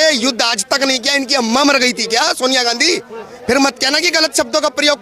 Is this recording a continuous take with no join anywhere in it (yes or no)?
yes